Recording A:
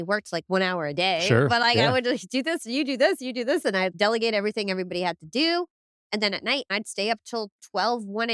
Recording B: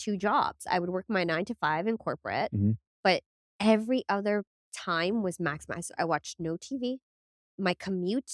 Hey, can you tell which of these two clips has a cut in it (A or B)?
A